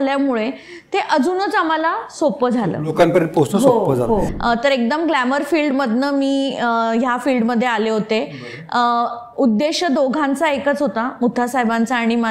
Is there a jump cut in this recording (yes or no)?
yes